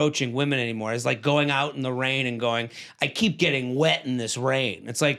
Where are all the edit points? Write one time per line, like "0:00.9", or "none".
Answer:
none